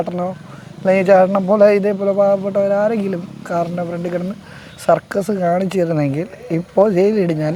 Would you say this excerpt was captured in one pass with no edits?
yes; 0 cuts

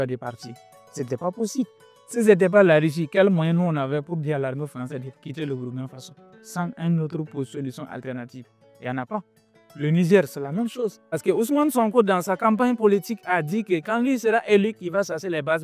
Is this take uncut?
no; 1 cut; at 11.1 s

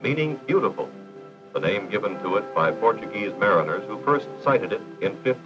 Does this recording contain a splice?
no; 0 cuts

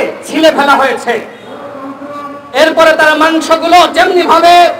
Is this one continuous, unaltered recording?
yes; 0 cuts

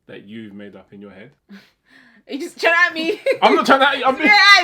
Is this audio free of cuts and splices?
no; 1 cut; at 1.4 s

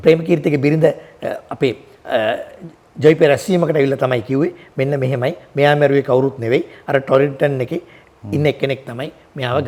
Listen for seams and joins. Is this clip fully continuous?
yes; 0 cuts

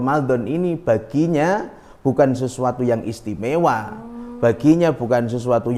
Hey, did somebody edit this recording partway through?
no; 0 cuts

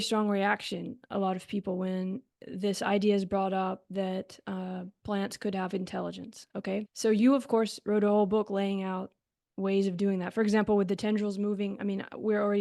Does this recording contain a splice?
no; 0 cuts

